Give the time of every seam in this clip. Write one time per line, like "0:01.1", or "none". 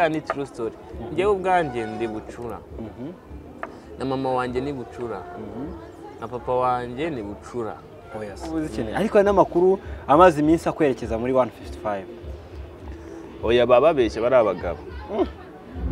0:08.8

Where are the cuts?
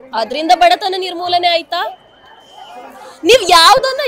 none

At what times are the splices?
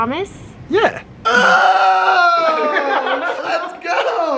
0:03.4

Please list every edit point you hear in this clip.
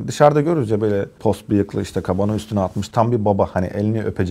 0:01.2

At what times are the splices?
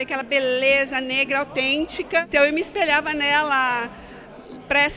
0:02.3

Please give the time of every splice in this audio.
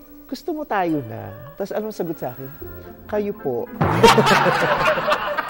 none

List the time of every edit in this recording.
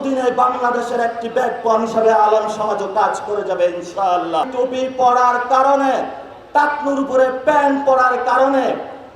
0:04.5

